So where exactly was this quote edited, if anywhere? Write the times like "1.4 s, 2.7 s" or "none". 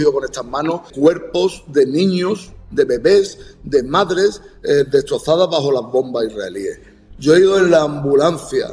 0.9 s